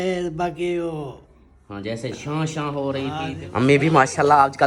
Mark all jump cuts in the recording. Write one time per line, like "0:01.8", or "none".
0:03.2